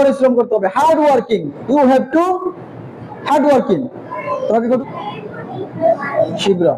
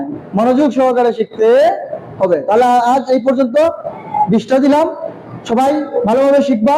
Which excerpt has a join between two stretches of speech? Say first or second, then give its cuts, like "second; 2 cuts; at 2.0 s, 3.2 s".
first; 1 cut; at 4.8 s